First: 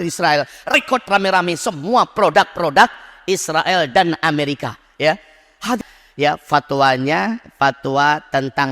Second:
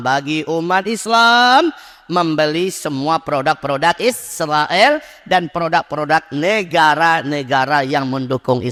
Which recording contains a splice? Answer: first; 2 cuts; at 0.7 s, 5.8 s

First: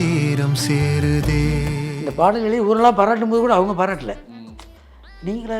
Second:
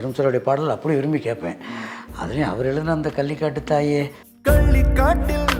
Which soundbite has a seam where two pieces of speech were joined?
first; 1 cut; at 1.8 s

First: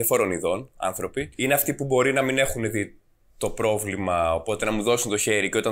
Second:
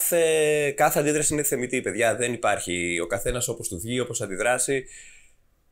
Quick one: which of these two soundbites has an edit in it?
first; 1 cut; at 1.3 s

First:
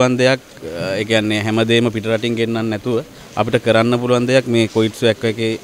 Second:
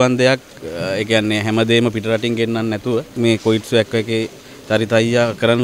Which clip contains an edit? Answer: second; 1 cut; at 3.2 s

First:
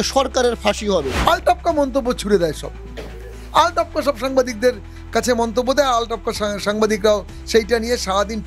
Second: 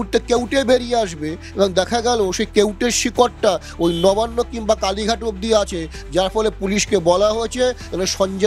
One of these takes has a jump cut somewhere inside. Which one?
first; 1 cut; at 1.1 s

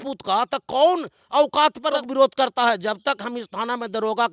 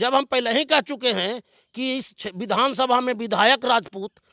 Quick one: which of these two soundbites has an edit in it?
first; 1 cut; at 2.0 s

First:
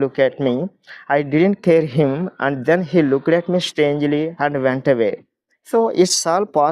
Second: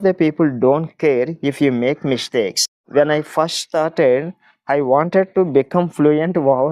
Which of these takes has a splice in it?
second; 1 cut; at 2.8 s

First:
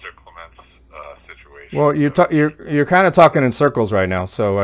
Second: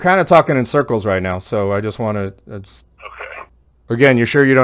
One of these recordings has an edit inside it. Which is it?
second; 1 cut; at 3.4 s

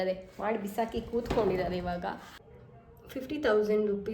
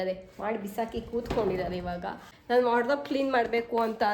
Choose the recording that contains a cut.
first; 1 cut; at 2.3 s

